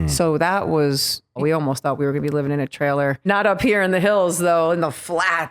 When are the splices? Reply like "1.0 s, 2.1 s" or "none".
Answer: 1.4 s, 3.3 s

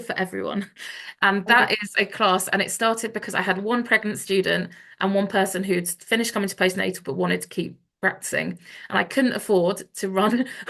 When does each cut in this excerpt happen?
none

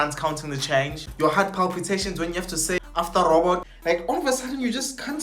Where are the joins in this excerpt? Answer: 1.0 s, 2.8 s, 3.7 s

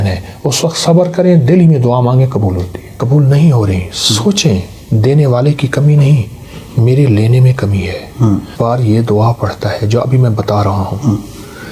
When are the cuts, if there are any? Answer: 3.0 s, 8.5 s

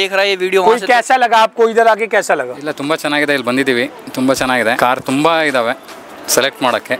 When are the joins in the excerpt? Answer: 4.8 s

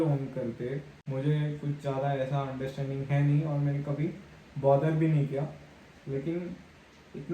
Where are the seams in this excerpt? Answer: 0.9 s

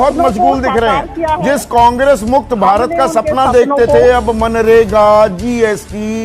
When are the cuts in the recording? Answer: none

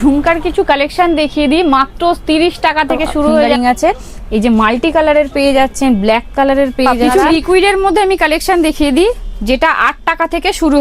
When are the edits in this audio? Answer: 3.5 s, 7.0 s

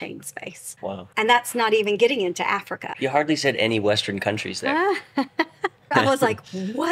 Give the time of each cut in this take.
1.0 s, 2.9 s, 5.9 s

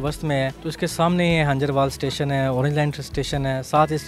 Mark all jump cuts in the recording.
none

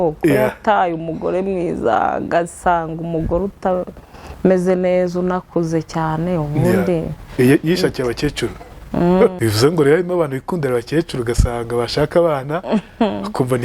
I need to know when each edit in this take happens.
9.4 s

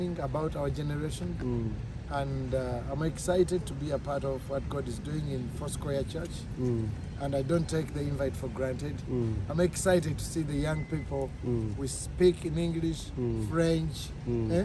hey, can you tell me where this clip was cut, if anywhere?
none

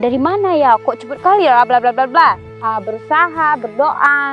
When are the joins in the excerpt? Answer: 2.6 s

